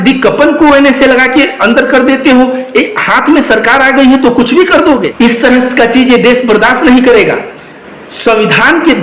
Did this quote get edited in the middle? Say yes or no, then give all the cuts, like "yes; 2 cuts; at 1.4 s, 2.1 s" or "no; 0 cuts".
yes; 1 cut; at 5.1 s